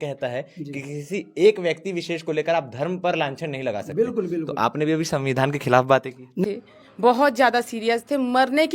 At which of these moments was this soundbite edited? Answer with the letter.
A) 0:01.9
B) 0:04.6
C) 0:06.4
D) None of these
C